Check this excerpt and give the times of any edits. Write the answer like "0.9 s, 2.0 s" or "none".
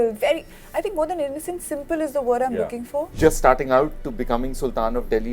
3.1 s